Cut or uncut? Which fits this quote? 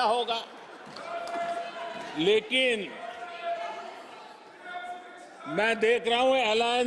uncut